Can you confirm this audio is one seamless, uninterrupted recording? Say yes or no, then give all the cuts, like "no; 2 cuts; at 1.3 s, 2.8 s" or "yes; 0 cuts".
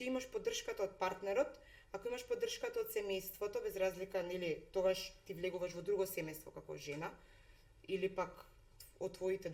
yes; 0 cuts